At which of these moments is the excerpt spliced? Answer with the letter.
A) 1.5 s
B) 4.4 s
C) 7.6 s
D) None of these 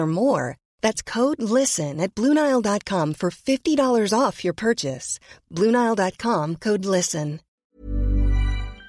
C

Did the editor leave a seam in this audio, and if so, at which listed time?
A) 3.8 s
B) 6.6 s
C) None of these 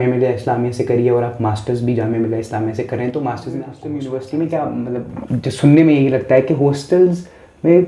A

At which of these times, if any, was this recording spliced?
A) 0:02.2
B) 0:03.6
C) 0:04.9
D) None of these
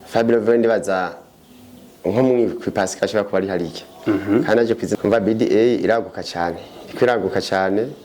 C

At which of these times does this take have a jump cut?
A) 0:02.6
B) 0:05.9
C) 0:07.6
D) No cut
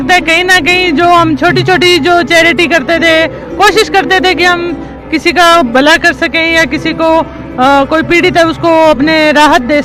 D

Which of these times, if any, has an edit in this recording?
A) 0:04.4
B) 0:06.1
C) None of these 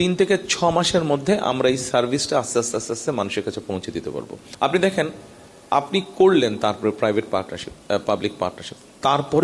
A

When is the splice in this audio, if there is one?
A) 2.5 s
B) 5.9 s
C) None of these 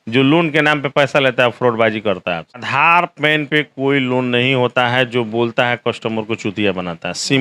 A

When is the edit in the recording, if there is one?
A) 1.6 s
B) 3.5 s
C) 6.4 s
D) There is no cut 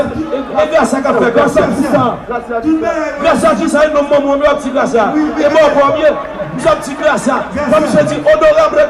D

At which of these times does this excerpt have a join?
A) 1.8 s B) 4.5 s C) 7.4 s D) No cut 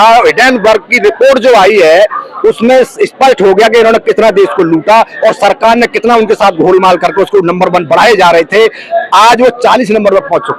D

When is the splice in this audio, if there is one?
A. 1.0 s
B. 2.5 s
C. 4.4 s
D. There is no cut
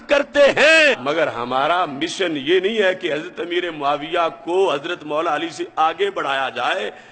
A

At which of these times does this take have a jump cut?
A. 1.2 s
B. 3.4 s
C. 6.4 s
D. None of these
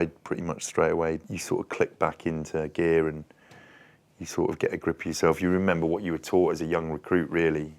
A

